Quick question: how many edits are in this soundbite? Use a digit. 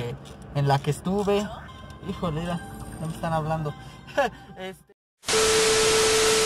1